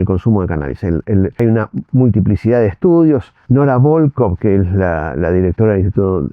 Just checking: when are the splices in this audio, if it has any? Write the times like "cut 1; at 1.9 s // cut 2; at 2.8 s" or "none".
cut 1; at 1.3 s // cut 2; at 3.3 s